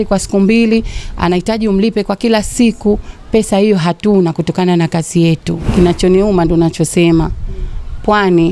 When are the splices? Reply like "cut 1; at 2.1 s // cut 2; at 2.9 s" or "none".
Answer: cut 1; at 5.6 s